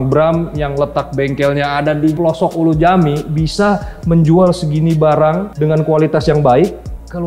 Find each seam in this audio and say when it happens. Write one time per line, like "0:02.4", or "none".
0:02.1